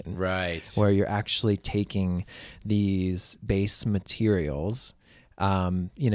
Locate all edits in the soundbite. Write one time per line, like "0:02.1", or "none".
none